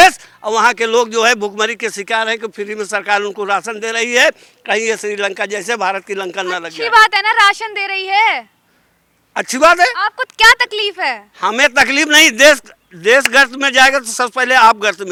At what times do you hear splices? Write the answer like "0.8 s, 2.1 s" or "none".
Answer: none